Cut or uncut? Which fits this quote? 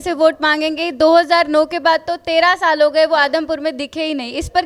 uncut